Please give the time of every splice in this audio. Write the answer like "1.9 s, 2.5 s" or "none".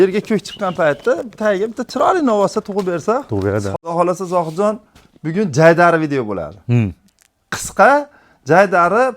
3.7 s